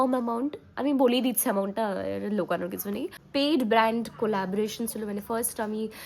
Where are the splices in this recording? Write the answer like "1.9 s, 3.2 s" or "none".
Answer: 3.2 s

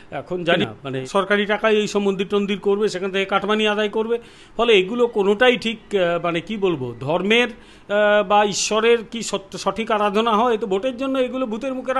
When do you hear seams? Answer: 1.0 s

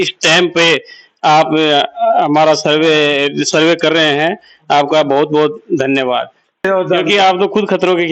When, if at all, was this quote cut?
6.7 s

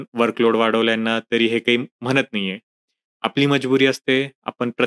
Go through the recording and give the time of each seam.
none

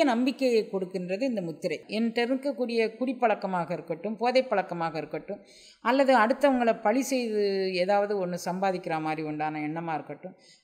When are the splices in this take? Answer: 1.8 s

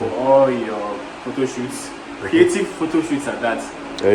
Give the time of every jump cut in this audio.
none

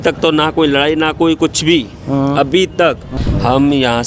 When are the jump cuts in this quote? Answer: 3.1 s

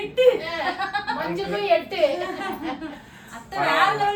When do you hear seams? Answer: none

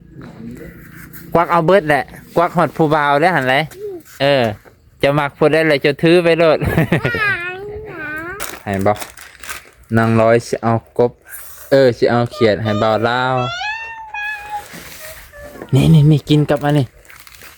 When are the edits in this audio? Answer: 8.4 s

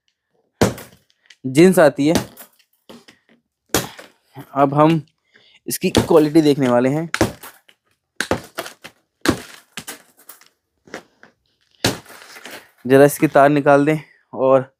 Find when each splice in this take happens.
none

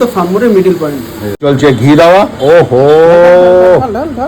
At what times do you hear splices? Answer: 1.2 s

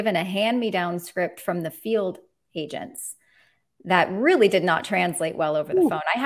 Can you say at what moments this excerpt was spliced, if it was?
none

